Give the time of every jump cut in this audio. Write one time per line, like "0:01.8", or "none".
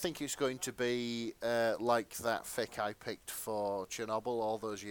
none